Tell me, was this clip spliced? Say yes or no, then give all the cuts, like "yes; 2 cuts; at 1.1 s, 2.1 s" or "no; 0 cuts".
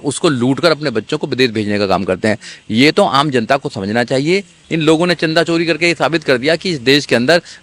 yes; 1 cut; at 4.6 s